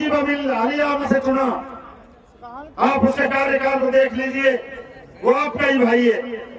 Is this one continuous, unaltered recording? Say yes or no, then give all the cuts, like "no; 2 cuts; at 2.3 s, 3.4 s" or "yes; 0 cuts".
no; 1 cut; at 1.0 s